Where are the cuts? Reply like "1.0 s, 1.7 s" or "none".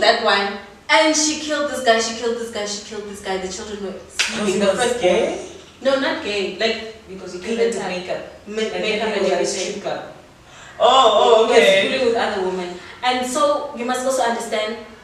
none